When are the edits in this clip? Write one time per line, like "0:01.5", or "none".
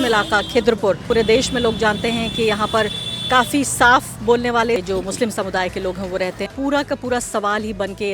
0:01.0
0:04.8
0:06.5

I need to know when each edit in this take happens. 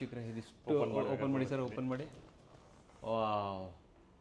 none

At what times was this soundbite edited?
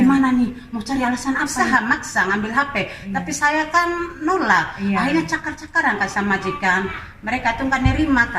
0:01.5

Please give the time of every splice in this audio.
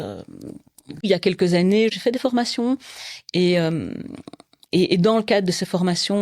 0:01.0
0:02.0

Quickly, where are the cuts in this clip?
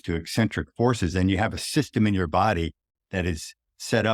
none

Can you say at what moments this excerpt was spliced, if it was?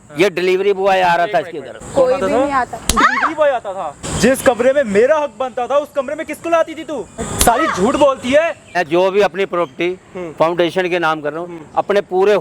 0:01.8
0:04.1
0:07.2
0:08.8

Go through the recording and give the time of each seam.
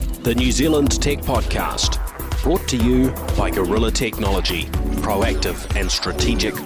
none

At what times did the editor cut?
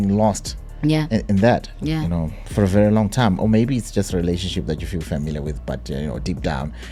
none

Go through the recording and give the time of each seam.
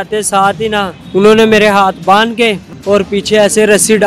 0:01.0
0:02.7

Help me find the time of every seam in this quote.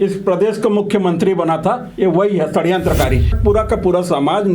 0:03.3

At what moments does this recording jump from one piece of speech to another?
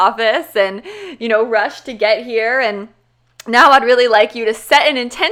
none

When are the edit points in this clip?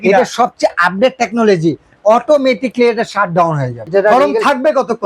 0:03.9

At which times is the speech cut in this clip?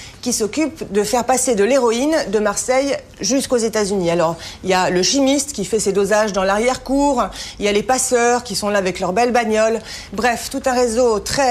0:03.4

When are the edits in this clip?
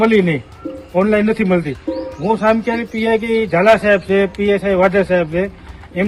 none

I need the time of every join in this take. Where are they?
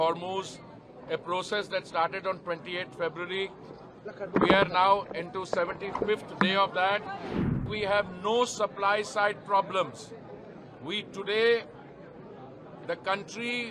0:07.5

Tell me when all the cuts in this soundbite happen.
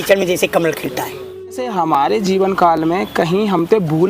0:01.7

